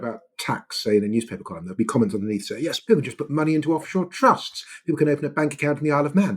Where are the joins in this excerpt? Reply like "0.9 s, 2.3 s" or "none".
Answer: 1.6 s, 2.8 s